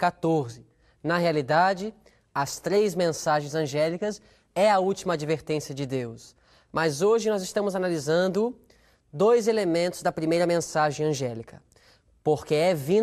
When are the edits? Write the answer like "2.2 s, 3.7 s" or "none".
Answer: none